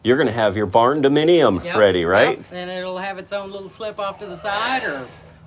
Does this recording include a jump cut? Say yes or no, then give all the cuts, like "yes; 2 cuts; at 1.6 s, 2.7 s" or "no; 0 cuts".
no; 0 cuts